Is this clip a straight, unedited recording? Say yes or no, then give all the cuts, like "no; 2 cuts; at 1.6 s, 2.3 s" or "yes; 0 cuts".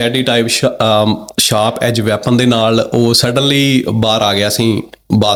yes; 0 cuts